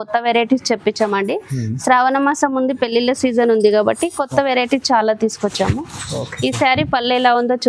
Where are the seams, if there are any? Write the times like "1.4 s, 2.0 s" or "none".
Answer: none